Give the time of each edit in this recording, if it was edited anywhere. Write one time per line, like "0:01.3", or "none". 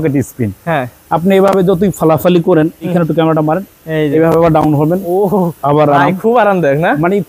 0:02.9